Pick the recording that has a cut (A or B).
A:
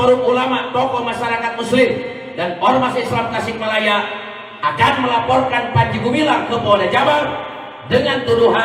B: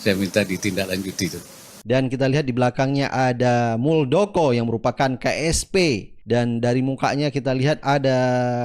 B